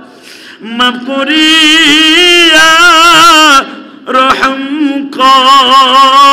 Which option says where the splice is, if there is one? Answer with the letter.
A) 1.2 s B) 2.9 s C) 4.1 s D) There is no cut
D